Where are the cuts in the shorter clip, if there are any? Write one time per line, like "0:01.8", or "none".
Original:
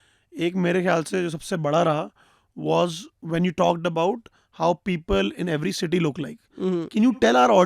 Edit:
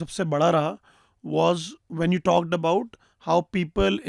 none